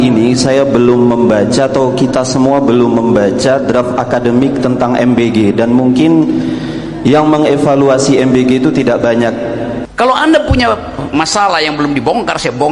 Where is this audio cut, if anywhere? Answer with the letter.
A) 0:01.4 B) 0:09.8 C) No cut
B